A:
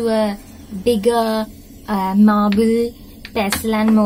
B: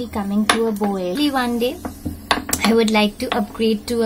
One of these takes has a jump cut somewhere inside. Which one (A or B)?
B